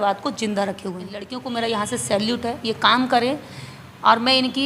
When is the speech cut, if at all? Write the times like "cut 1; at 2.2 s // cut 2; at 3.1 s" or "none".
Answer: cut 1; at 1.3 s